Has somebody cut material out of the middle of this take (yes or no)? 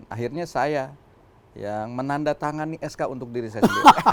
no